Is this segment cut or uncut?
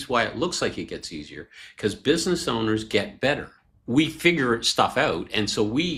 uncut